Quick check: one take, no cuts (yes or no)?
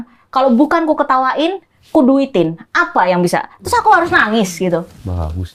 yes